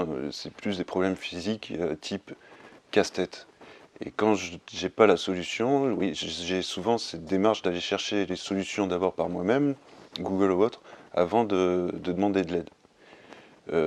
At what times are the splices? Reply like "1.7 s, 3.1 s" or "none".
none